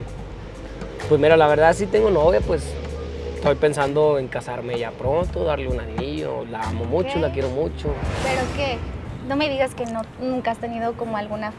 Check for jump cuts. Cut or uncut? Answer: uncut